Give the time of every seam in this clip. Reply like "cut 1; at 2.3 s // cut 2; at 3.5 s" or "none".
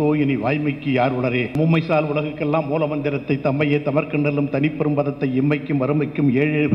cut 1; at 1.6 s